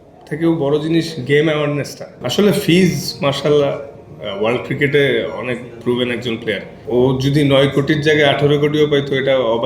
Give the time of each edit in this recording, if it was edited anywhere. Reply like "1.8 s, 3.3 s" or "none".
2.2 s, 6.7 s